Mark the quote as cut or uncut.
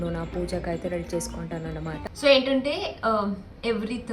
cut